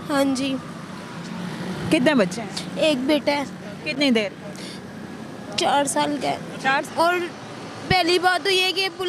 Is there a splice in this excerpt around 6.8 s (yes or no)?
yes